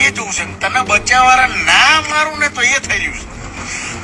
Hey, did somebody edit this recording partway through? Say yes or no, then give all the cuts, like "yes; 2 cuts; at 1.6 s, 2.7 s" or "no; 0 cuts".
no; 0 cuts